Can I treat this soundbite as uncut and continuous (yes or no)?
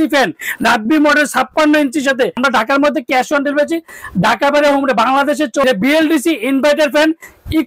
no